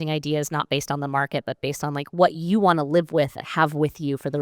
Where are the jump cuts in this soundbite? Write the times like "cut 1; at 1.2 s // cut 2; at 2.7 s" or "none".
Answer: cut 1; at 3.4 s